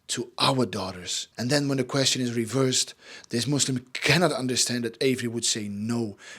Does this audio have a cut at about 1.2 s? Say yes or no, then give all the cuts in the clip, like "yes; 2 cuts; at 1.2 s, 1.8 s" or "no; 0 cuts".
yes; 1 cut; at 1.2 s